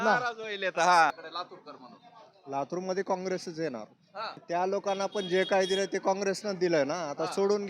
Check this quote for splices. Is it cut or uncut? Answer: cut